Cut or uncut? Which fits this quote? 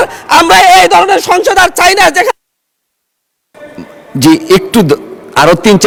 uncut